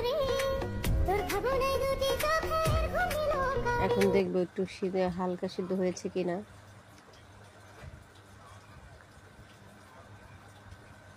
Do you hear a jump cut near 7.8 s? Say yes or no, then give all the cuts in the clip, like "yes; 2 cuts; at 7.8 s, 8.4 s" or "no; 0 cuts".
yes; 1 cut; at 7.8 s